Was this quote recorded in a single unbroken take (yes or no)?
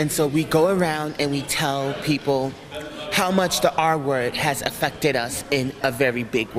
yes